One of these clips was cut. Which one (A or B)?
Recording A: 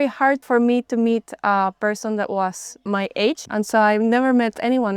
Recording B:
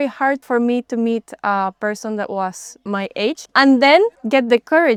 A